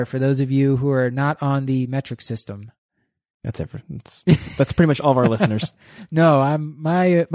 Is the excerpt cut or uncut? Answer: uncut